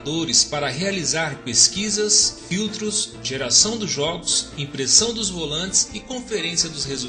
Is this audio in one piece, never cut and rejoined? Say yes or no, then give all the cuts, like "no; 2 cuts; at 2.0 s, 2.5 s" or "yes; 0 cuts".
no; 1 cut; at 5.9 s